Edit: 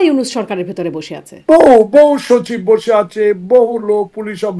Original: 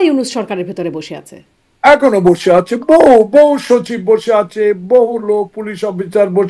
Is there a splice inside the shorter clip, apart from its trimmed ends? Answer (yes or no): yes